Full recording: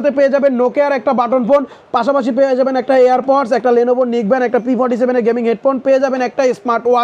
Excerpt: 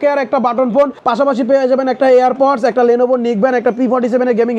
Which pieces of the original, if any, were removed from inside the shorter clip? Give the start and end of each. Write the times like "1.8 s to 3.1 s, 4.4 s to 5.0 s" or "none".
1.7 s to 1.8 s